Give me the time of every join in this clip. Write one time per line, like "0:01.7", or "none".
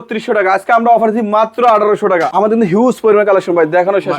0:02.3